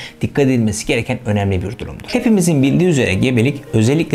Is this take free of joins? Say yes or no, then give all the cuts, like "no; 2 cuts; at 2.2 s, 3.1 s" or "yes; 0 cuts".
no; 1 cut; at 2.0 s